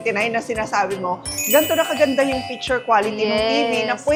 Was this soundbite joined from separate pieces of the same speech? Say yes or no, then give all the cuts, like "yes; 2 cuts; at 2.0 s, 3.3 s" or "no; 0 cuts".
no; 0 cuts